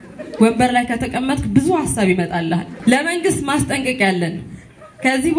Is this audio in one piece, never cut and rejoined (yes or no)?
no